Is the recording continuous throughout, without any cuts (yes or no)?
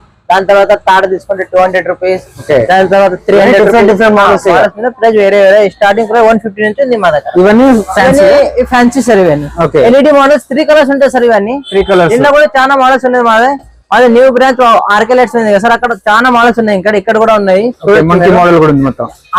yes